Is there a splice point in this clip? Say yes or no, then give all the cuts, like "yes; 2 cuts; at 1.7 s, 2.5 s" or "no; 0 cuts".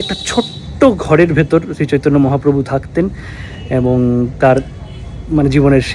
no; 0 cuts